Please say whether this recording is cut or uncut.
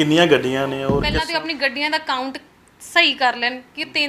cut